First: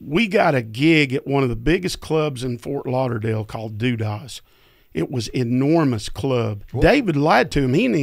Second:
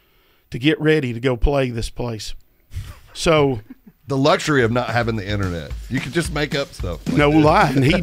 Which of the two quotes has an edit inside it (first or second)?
first